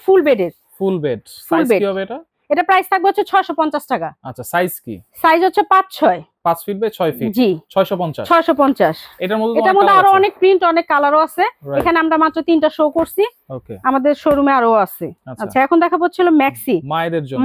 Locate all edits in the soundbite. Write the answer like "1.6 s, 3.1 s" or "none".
none